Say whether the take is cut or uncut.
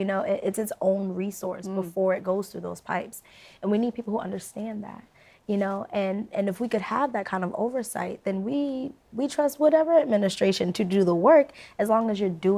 uncut